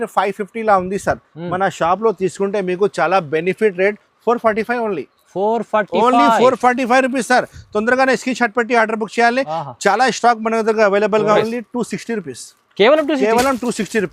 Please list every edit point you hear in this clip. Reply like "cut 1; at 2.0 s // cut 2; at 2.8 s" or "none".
cut 1; at 11.4 s